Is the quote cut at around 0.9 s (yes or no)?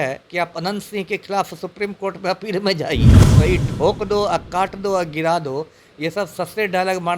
no